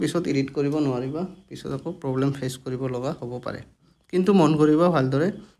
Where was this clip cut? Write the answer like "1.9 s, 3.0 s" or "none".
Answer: 3.9 s